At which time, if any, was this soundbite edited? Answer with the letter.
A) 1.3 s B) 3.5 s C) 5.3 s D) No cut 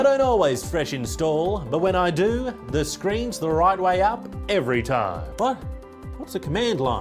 C